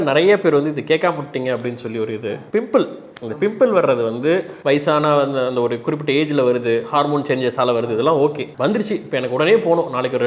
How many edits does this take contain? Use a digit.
0